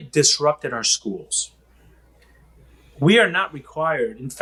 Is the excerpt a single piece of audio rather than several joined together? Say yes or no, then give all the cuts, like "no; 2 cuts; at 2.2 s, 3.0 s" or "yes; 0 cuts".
yes; 0 cuts